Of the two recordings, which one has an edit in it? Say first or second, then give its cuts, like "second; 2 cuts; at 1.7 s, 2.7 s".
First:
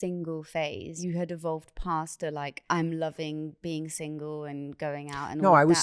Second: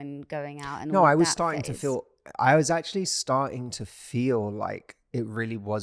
first; 2 cuts; at 1.0 s, 2.5 s